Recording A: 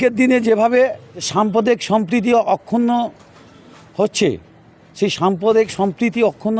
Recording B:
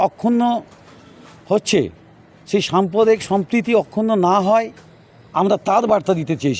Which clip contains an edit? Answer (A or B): A